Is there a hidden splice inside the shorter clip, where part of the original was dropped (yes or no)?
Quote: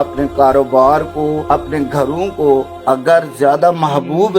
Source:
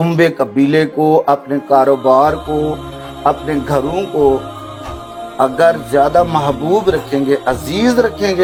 yes